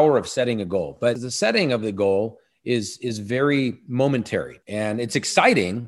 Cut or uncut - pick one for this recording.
cut